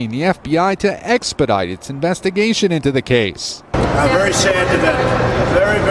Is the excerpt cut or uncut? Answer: uncut